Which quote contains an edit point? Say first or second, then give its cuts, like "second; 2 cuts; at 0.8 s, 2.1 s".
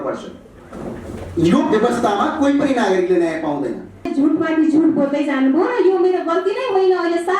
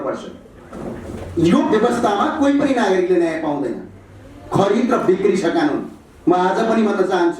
first; 1 cut; at 4.1 s